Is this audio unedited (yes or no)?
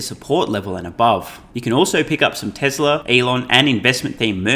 no